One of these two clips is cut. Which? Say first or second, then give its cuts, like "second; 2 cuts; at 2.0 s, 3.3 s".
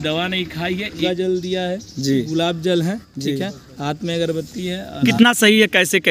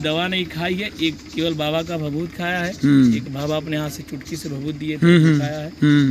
first; 2 cuts; at 1.0 s, 5.1 s